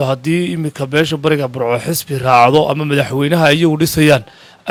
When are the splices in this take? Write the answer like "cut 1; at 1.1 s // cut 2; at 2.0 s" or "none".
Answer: none